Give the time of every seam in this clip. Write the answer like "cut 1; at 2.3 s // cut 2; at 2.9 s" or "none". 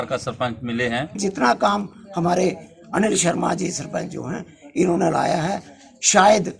cut 1; at 1.2 s